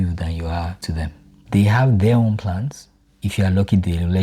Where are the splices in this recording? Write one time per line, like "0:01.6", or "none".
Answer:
0:01.5
0:03.1